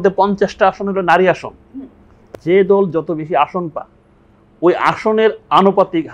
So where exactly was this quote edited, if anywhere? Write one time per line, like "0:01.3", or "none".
0:02.3